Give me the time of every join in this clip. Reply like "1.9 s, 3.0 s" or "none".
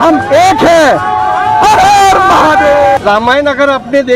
3.0 s